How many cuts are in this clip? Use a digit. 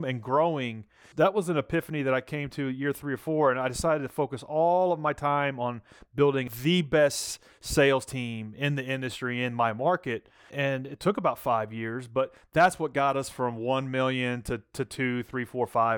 3